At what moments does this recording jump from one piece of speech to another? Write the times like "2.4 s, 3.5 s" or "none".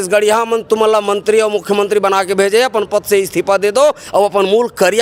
none